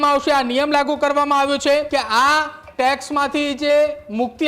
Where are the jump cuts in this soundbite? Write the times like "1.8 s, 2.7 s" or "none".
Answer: 1.9 s

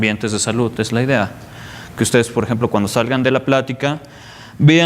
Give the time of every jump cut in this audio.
3.6 s

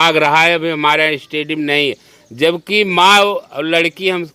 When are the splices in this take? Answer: none

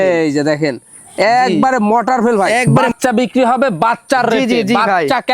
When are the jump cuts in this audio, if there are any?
2.8 s

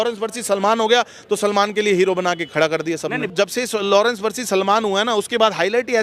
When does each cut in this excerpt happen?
3.3 s

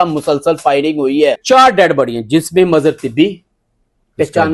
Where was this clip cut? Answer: 1.4 s

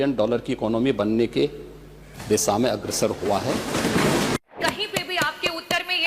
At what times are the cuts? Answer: 4.4 s

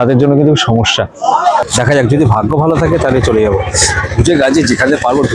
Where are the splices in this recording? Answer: 1.6 s

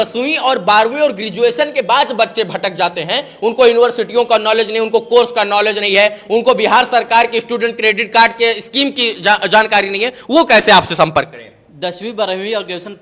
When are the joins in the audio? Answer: none

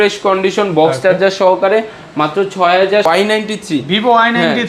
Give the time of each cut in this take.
3.0 s

